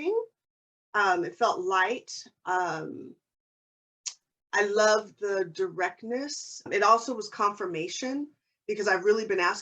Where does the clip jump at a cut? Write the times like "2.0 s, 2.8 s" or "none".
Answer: 6.7 s